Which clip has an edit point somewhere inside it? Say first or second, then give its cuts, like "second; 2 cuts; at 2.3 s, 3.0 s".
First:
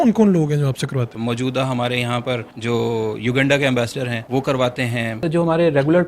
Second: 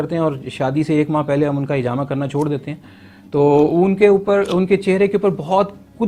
first; 4 cuts; at 1.1 s, 2.5 s, 4.2 s, 5.2 s